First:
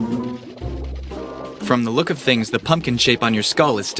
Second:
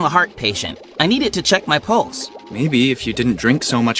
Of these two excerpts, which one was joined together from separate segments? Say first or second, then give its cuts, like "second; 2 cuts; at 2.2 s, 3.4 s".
first; 1 cut; at 1.7 s